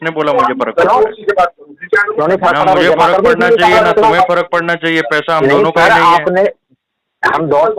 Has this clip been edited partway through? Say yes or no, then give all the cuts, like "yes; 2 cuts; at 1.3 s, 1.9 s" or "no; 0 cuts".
no; 0 cuts